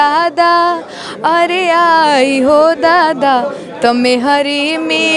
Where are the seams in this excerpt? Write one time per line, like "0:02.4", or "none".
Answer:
none